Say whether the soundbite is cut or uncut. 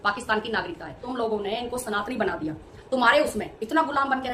cut